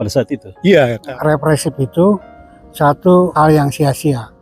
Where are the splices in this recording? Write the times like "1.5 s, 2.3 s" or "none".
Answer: 1.1 s